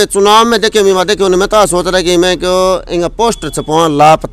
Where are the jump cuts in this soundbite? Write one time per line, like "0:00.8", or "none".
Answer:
none